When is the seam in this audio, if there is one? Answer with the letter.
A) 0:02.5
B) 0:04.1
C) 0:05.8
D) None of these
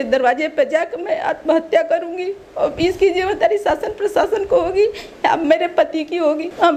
D